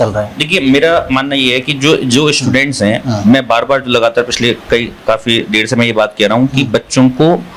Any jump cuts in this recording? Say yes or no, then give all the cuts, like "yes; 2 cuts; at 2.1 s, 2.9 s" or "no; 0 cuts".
no; 0 cuts